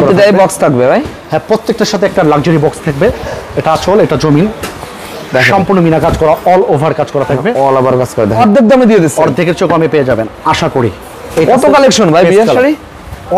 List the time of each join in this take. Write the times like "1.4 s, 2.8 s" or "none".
8.4 s